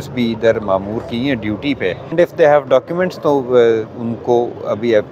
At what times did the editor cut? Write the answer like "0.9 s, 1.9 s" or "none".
2.1 s